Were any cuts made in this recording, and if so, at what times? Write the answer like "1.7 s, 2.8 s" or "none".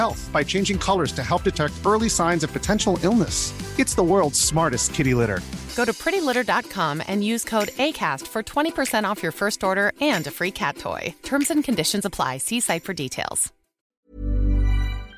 13.9 s